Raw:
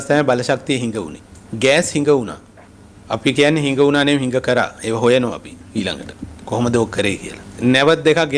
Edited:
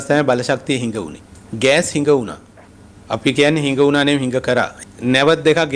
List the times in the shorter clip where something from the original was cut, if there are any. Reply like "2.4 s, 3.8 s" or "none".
4.8 s